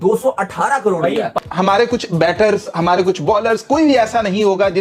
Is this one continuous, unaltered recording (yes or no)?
no